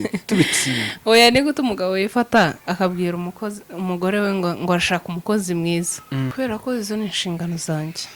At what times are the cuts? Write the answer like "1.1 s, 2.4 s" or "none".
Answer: 6.3 s